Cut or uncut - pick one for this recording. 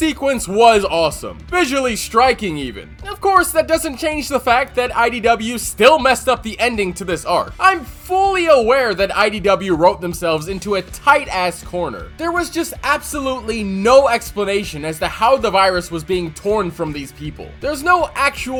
uncut